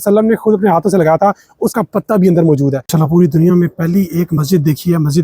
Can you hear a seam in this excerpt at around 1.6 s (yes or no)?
no